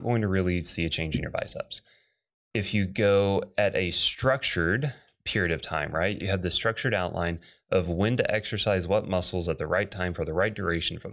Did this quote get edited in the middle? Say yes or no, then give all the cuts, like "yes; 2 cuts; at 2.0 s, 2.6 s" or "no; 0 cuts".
yes; 1 cut; at 6.2 s